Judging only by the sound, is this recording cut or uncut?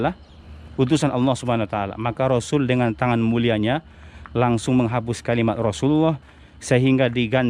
uncut